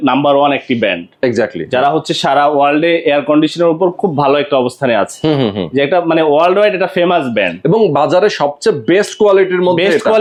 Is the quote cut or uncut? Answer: uncut